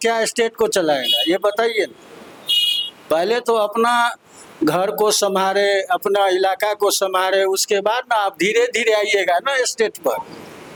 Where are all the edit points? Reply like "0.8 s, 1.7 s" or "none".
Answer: none